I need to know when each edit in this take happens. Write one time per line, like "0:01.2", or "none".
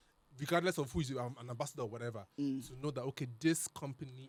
none